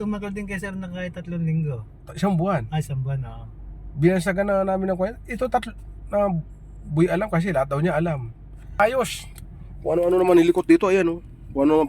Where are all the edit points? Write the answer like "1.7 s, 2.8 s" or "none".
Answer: 8.8 s